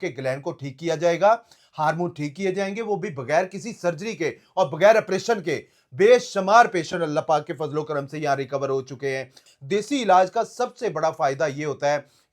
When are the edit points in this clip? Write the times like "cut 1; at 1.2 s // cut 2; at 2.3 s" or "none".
cut 1; at 9.4 s

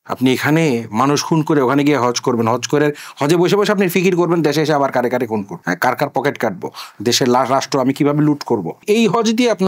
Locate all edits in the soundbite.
cut 1; at 8.7 s

